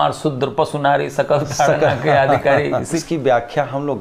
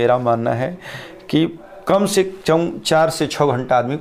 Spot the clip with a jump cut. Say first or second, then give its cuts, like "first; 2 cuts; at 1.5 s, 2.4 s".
first; 1 cut; at 3.0 s